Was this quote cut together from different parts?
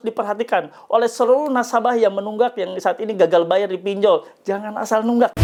no; 0 cuts

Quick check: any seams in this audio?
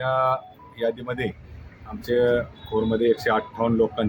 no; 0 cuts

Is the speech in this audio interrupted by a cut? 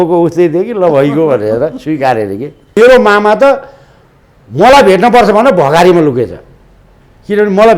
yes; 1 cut; at 2.8 s

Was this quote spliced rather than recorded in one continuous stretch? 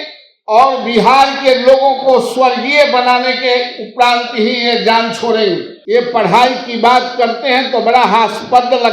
yes; 1 cut; at 5.7 s

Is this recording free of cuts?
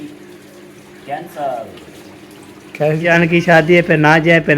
no; 1 cut; at 3.1 s

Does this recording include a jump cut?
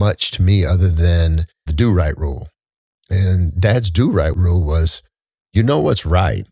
yes; 2 cuts; at 1.7 s, 4.4 s

